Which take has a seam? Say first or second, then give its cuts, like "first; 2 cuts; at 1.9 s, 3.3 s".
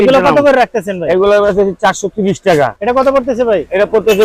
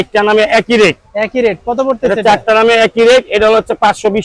first; 1 cut; at 2.7 s